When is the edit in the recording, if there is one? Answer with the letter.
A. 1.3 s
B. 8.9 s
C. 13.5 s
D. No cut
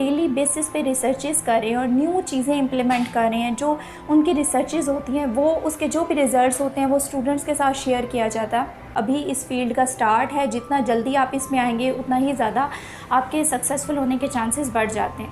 B